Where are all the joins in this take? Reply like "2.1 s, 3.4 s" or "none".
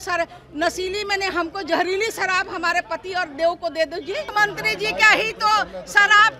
4.3 s